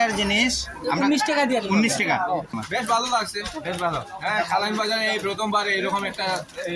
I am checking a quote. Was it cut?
yes; 1 cut; at 2.5 s

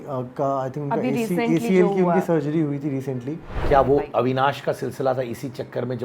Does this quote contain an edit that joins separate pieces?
yes; 1 cut; at 3.6 s

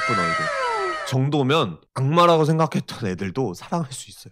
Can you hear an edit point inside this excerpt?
yes; 1 cut; at 1.9 s

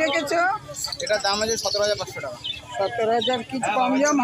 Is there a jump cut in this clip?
no; 0 cuts

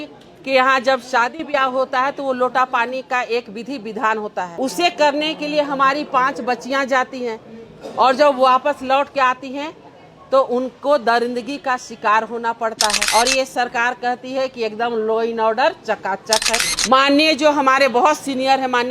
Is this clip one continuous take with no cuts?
no; 3 cuts; at 4.5 s, 13.0 s, 16.8 s

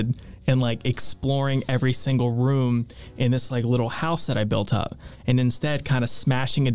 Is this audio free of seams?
yes; 0 cuts

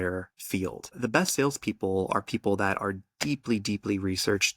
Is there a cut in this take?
yes; 1 cut; at 0.9 s

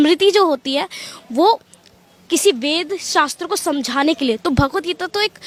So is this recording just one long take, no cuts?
yes; 0 cuts

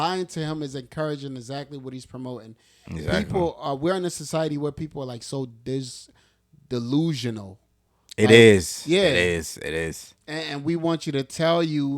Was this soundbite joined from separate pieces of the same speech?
no; 0 cuts

